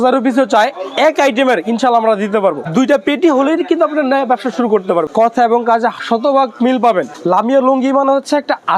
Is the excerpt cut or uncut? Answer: cut